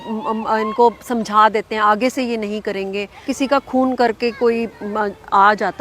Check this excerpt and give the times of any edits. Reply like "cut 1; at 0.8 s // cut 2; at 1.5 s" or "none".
cut 1; at 3.3 s

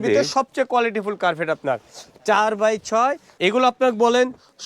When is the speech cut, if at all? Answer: cut 1; at 3.3 s

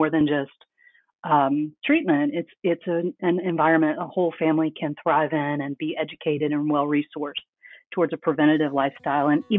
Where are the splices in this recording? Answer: none

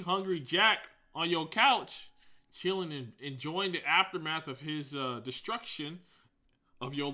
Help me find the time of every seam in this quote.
none

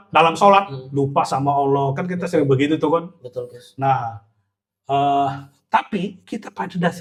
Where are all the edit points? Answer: none

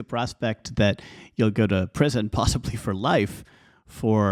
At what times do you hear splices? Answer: none

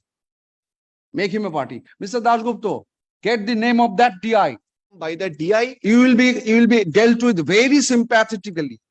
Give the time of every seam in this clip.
cut 1; at 5.0 s

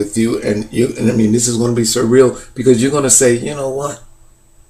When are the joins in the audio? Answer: cut 1; at 1.5 s

